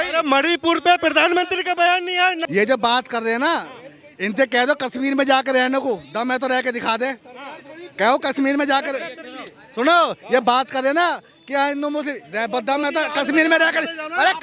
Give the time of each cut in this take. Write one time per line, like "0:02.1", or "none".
0:02.4